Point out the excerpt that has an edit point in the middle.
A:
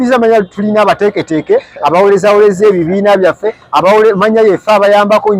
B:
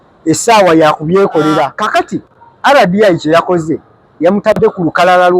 B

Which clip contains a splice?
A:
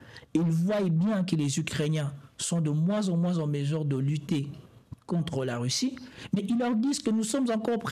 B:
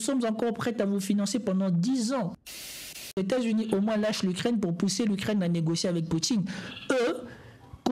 B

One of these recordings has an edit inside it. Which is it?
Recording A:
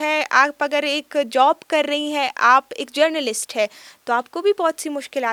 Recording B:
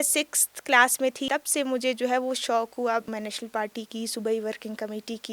B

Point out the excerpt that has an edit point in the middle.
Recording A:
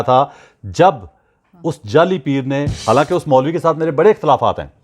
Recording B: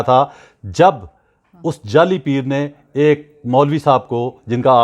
A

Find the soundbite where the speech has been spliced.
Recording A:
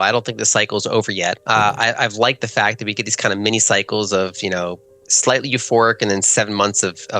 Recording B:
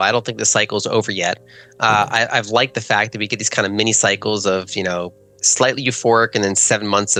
A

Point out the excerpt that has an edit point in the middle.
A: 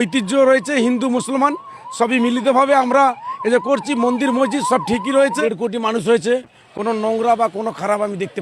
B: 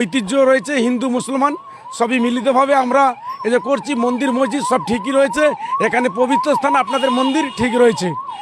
A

